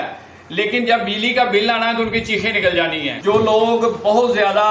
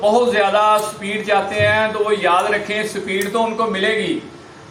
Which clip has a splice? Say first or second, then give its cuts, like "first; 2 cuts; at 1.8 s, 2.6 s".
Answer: first; 1 cut; at 3.1 s